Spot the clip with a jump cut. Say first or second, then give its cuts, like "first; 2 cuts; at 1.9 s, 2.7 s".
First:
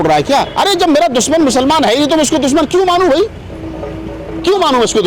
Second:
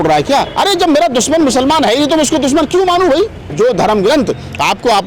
second; 1 cut; at 3.5 s